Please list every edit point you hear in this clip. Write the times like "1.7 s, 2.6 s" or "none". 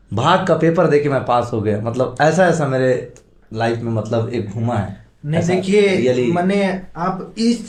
none